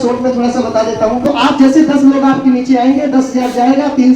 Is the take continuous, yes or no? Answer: no